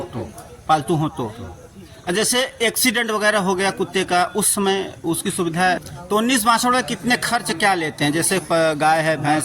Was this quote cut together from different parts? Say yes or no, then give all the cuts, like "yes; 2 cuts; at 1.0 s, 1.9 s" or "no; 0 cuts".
yes; 1 cut; at 5.8 s